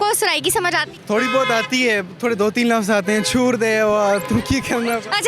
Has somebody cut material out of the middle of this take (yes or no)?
yes